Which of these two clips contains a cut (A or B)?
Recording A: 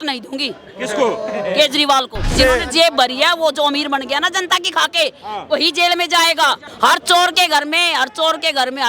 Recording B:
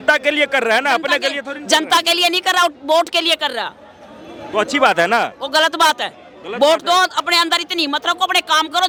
A